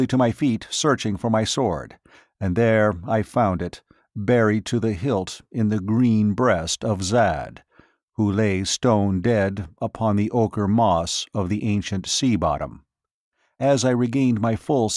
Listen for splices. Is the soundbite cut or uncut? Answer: uncut